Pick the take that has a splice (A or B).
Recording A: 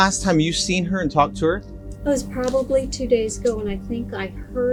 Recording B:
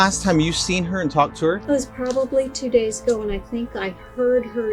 B